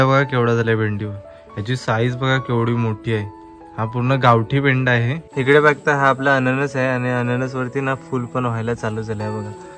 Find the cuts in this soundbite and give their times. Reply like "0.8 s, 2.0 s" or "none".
5.2 s